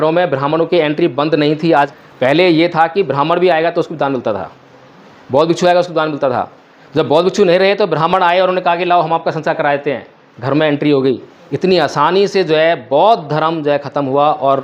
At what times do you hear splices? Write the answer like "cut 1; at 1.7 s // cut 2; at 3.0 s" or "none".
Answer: cut 1; at 1.9 s